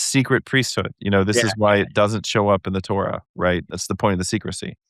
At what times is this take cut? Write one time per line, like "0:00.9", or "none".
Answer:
0:03.7